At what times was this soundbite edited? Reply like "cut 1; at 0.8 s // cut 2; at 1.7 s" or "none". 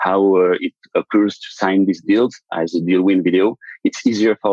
none